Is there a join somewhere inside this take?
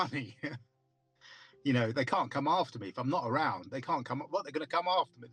no; 0 cuts

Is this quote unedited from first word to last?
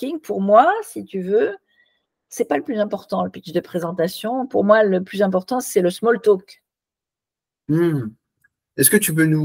yes; 0 cuts

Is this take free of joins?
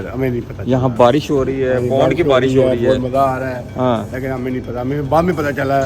yes; 0 cuts

